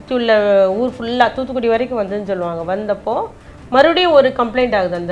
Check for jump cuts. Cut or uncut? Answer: uncut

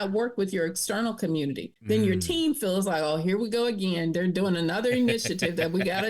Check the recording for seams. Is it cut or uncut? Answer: cut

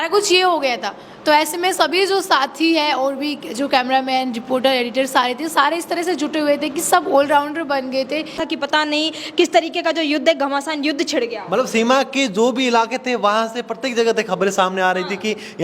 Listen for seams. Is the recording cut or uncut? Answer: cut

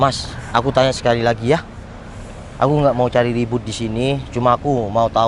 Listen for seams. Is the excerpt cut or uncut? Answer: uncut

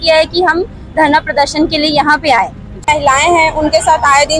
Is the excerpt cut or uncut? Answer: cut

